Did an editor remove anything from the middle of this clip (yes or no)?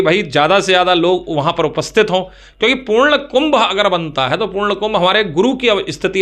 no